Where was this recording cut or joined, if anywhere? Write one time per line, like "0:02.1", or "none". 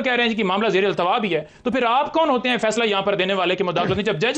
none